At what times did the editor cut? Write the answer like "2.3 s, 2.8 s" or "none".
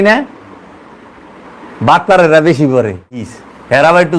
3.3 s